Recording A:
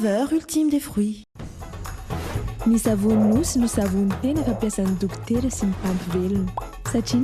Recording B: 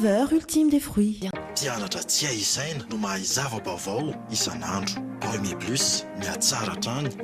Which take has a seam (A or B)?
A